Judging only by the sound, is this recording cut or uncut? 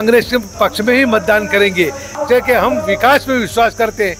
cut